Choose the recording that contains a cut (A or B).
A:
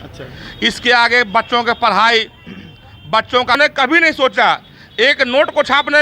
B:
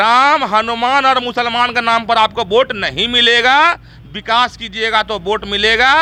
A